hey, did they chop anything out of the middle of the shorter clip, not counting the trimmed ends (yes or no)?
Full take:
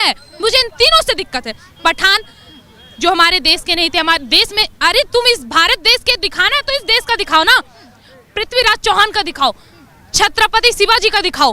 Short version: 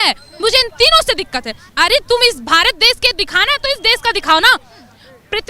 yes